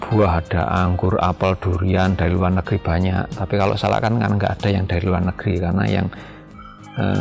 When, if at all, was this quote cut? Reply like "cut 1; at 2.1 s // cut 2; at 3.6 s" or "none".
none